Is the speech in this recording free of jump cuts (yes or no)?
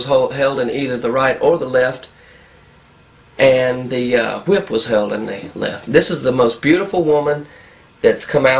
no